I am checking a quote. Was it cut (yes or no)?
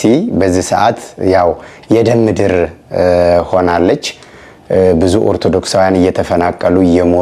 no